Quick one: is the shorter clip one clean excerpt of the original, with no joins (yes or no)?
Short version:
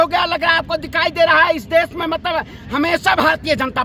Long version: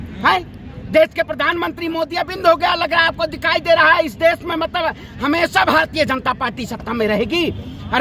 yes